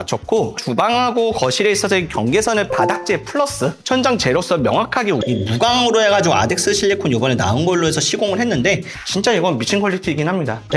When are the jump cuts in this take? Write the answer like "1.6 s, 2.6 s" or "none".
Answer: 5.2 s, 8.9 s